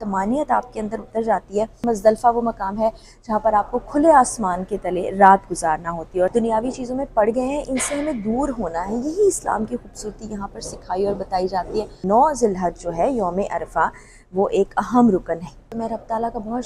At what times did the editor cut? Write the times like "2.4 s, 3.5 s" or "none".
1.8 s, 6.3 s, 11.9 s, 15.6 s